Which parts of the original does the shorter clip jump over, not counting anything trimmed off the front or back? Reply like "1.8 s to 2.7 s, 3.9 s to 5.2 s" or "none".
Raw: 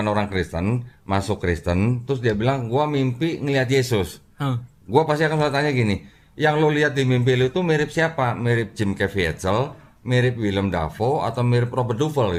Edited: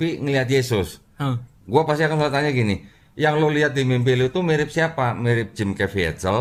none

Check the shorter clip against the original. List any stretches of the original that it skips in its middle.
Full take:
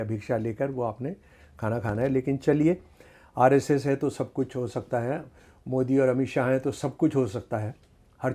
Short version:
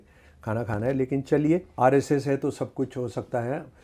2.8 s to 3.3 s

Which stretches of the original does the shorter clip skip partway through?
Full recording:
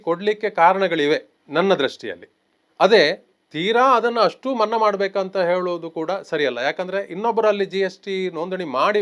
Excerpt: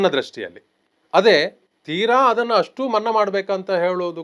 none

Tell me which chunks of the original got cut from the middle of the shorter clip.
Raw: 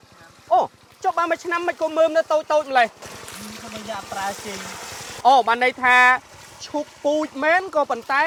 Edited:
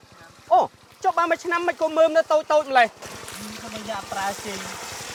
none

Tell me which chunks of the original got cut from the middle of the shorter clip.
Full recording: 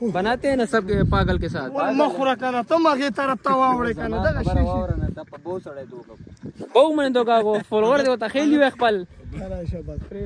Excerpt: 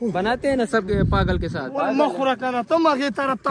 none

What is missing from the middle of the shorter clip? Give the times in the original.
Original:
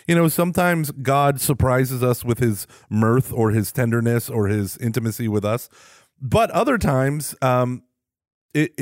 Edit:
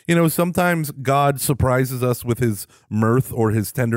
none

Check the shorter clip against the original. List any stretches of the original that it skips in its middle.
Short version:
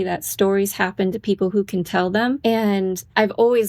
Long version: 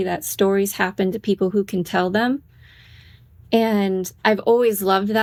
2.4 s to 3.5 s

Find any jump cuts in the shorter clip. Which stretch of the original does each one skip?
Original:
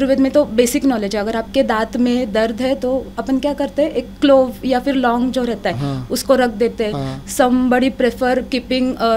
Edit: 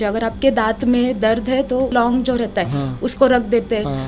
3.0 s to 5.0 s

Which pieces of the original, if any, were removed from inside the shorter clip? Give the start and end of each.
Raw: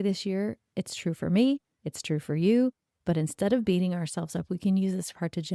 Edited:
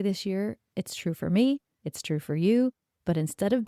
none

